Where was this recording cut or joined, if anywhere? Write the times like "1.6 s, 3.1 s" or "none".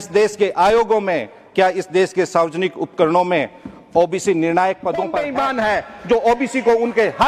5.2 s